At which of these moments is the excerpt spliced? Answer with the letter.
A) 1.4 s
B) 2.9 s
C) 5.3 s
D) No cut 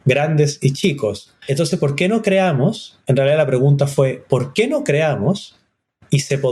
A